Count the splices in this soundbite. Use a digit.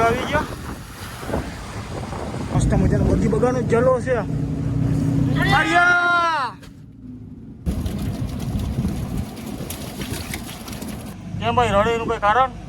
3